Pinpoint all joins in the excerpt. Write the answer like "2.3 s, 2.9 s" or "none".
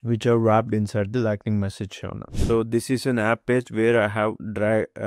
2.3 s